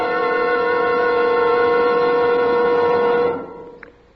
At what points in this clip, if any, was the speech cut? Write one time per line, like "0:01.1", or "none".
none